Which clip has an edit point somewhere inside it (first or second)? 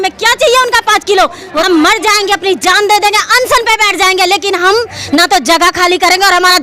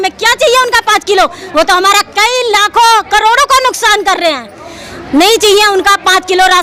first